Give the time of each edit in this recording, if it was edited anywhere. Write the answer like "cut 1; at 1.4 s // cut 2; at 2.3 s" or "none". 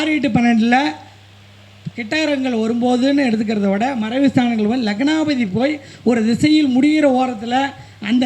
none